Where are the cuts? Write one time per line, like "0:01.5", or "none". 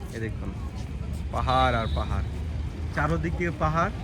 none

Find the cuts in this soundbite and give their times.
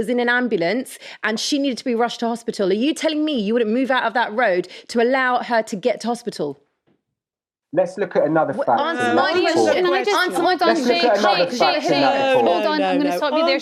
none

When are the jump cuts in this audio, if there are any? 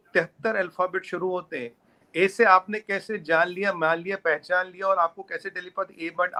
none

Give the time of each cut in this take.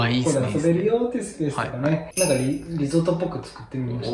0:02.1

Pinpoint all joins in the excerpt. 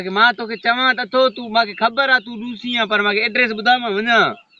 none

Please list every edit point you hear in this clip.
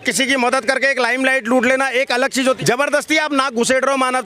0:02.6

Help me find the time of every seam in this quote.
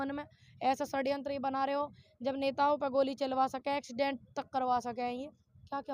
none

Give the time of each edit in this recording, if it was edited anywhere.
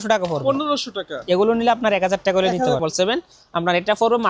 0:02.8

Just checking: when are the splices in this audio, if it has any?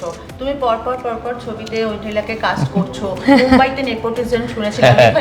none

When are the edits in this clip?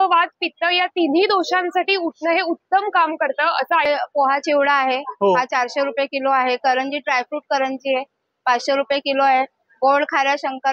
0:03.8

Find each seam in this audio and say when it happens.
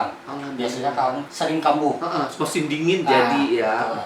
0:01.2

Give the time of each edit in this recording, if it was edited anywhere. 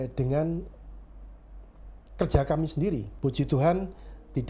0:03.1

